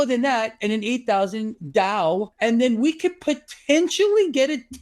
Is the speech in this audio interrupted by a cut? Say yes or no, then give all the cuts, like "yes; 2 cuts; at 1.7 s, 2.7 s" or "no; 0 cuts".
yes; 1 cut; at 2.3 s